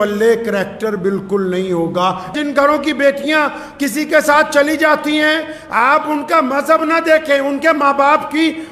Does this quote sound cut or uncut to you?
cut